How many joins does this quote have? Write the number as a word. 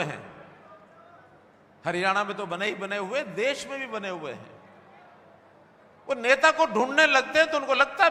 zero